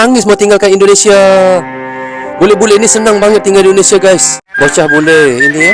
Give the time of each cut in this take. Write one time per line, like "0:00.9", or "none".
0:04.4